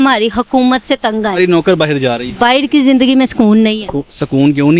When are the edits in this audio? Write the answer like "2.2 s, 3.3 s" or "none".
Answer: 1.4 s